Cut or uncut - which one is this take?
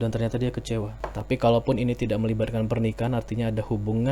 cut